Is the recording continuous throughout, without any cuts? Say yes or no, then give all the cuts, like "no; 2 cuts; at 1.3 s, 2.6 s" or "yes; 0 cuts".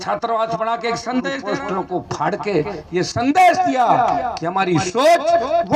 no; 1 cut; at 1.5 s